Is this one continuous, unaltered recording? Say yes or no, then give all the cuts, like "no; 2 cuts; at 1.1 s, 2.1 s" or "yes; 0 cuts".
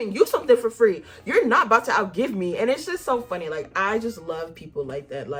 yes; 0 cuts